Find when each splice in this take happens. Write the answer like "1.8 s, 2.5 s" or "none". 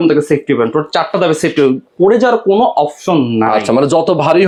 none